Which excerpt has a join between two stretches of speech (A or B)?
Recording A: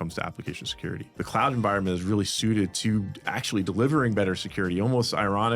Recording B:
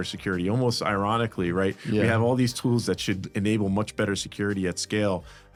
A